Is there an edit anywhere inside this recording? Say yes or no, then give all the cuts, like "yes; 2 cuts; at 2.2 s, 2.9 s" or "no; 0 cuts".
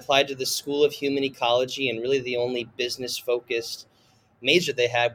no; 0 cuts